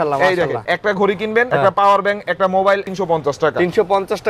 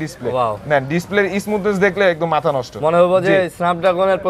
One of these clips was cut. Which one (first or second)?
first